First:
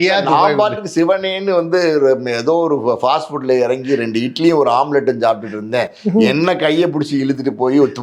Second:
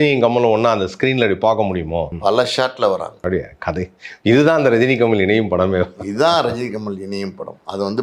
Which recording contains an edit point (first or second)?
second